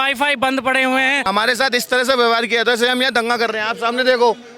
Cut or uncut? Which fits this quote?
cut